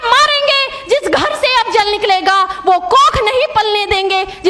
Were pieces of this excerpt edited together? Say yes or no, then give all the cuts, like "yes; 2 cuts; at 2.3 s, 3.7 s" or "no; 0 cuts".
no; 0 cuts